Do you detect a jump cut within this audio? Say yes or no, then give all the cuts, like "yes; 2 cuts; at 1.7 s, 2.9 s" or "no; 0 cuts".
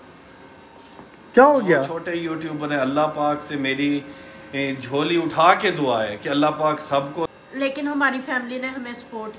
yes; 2 cuts; at 2.0 s, 7.3 s